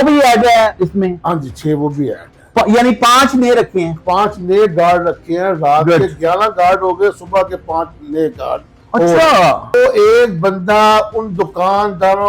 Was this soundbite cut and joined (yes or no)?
yes